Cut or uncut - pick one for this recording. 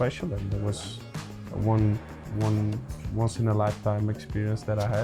uncut